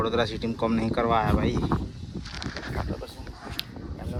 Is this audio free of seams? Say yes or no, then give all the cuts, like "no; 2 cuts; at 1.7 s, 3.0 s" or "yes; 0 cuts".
yes; 0 cuts